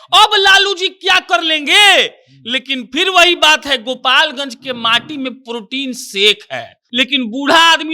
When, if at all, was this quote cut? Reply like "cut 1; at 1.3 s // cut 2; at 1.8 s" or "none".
cut 1; at 6.8 s